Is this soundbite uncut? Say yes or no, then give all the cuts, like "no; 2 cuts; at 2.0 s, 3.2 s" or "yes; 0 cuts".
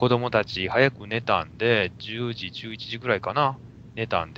yes; 0 cuts